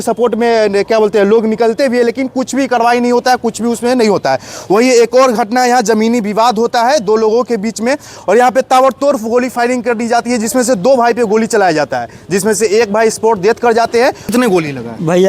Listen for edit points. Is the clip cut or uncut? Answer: cut